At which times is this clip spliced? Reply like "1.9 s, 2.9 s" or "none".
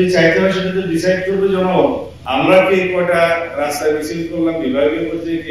2.1 s